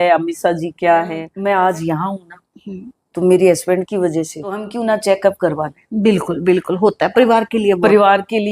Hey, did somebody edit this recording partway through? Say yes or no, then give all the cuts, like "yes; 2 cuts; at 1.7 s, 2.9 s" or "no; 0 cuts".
yes; 2 cuts; at 1.3 s, 4.7 s